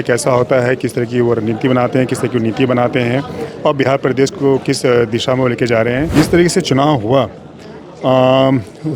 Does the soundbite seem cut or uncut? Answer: cut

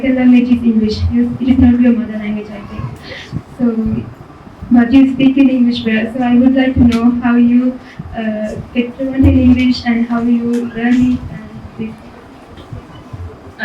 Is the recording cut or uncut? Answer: uncut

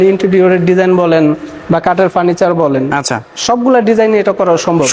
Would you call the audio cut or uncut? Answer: uncut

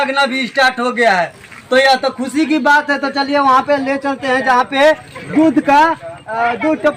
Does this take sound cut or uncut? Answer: uncut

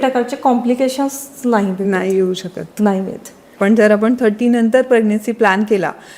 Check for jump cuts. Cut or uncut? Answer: cut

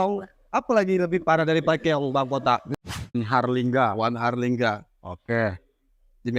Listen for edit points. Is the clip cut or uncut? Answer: cut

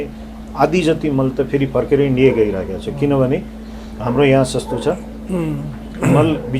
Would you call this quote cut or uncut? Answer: uncut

